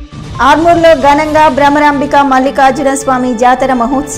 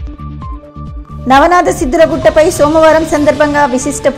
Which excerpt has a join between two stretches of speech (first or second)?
second